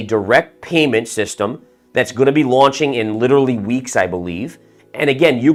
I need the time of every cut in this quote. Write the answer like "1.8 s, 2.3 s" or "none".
none